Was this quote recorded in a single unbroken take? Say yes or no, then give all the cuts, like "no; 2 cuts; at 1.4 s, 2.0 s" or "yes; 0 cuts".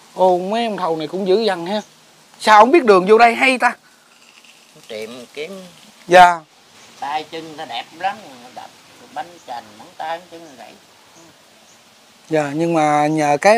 no; 1 cut; at 6.3 s